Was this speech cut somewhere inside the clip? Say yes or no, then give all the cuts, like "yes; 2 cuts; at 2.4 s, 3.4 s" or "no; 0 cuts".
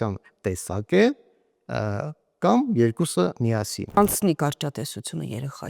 yes; 1 cut; at 4.0 s